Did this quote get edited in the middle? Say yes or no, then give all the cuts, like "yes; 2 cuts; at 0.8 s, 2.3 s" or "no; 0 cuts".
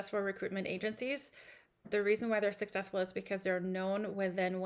no; 0 cuts